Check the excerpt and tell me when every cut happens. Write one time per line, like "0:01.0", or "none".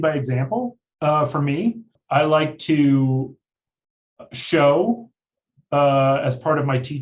0:02.0